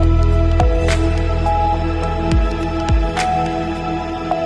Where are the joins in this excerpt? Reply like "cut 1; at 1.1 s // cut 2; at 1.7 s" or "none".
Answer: none